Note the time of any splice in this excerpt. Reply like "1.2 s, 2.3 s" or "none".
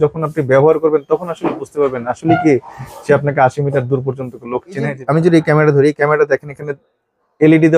4.9 s